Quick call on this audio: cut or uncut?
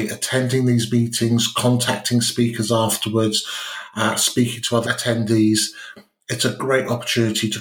uncut